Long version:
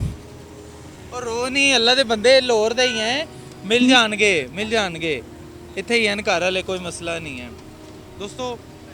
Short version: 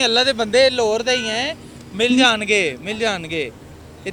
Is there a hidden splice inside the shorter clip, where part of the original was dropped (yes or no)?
no